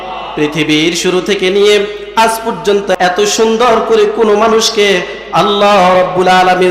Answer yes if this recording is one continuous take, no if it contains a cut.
no